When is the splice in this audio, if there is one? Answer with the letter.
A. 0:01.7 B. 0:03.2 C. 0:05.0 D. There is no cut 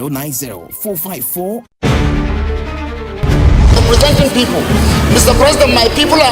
A